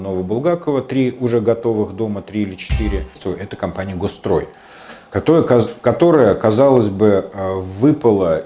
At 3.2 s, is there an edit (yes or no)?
yes